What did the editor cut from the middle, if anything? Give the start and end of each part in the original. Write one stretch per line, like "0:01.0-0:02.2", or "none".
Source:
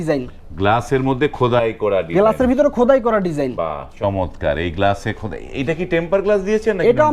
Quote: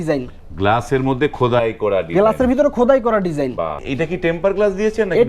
0:03.8-0:05.5